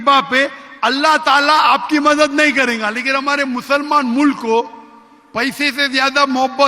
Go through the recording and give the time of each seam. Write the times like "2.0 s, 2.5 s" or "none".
none